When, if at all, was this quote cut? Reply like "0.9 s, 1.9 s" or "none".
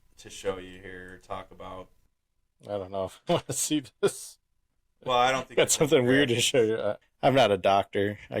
7.0 s